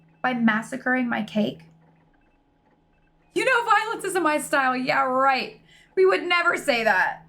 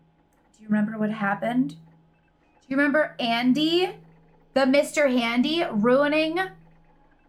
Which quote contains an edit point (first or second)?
first